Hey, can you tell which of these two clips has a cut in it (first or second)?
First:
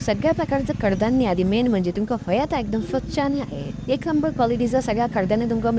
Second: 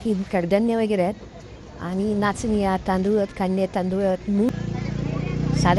second